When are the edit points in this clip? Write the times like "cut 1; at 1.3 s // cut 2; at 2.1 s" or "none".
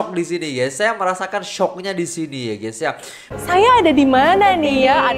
cut 1; at 3.3 s